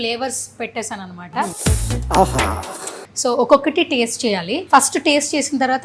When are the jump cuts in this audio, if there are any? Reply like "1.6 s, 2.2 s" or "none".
1.6 s, 3.0 s, 4.5 s